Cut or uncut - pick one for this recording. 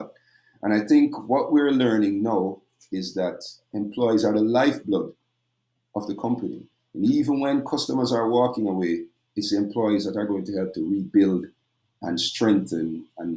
uncut